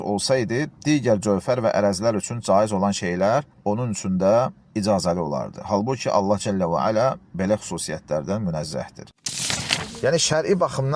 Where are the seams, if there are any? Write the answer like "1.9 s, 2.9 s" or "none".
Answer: 9.4 s